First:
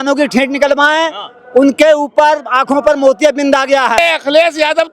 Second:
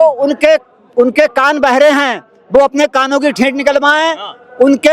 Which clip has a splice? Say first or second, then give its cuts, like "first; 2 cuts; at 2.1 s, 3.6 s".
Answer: first; 1 cut; at 4.0 s